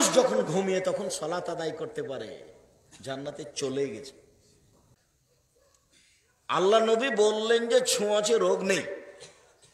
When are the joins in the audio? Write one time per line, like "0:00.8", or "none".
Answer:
0:04.8